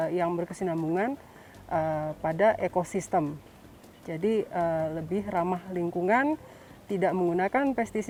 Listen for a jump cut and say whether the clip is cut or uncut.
uncut